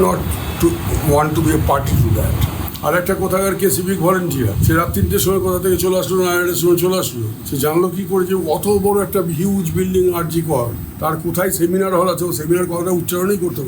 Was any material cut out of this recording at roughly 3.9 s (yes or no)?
no